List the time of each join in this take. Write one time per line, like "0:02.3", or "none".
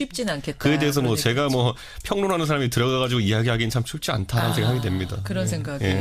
0:04.1

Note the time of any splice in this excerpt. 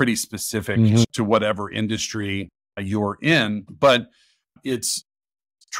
0:01.0
0:03.7

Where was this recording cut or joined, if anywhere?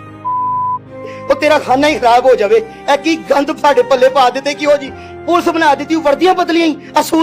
none

